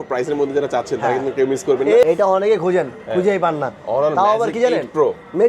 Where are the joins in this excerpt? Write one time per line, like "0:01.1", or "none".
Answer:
0:02.0